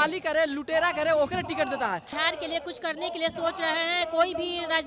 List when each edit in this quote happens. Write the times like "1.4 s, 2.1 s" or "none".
2.1 s